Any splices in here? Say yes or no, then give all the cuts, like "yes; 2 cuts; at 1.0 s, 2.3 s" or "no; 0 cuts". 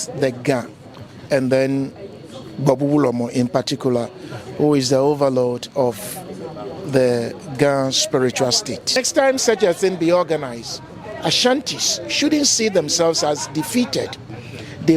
yes; 1 cut; at 9.0 s